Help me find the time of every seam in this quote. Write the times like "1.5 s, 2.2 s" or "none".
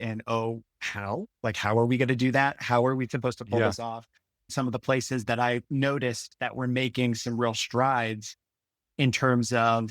4.5 s